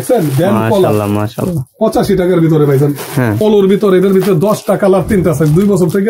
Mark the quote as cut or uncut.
cut